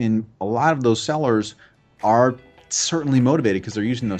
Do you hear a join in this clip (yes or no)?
no